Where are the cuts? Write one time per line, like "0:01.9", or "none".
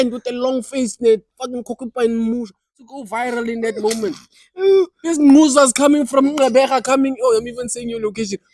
0:02.8